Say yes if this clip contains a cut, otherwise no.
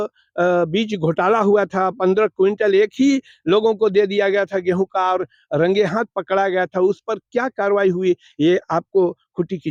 no